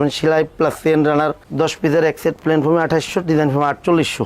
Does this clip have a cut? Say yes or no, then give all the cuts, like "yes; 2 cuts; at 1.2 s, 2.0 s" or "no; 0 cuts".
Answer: no; 0 cuts